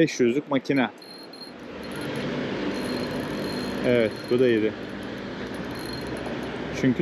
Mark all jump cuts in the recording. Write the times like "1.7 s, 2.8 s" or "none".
1.8 s